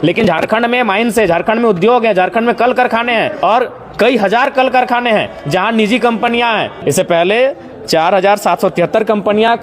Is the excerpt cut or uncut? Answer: cut